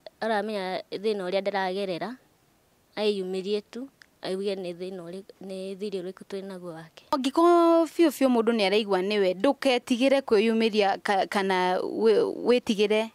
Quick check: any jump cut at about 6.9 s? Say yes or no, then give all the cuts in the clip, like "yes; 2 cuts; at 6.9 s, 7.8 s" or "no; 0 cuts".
yes; 1 cut; at 6.9 s